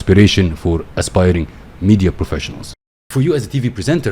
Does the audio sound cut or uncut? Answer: cut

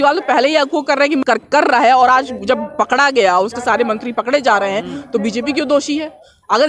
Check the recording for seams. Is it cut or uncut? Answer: cut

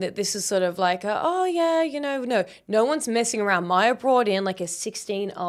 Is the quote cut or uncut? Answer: uncut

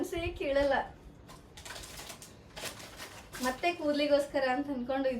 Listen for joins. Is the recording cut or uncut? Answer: uncut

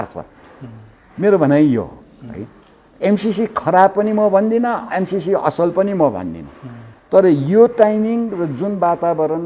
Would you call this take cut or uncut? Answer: uncut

